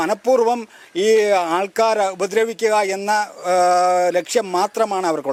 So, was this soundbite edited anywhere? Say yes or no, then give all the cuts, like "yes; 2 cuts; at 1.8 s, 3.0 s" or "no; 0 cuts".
no; 0 cuts